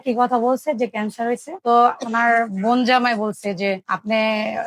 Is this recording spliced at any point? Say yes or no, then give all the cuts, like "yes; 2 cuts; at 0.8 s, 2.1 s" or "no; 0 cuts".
yes; 1 cut; at 1.5 s